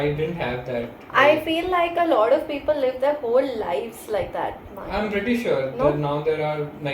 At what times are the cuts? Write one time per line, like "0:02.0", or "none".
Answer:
none